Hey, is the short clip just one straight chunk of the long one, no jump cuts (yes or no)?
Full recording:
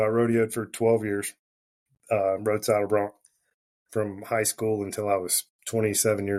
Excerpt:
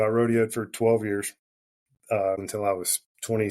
no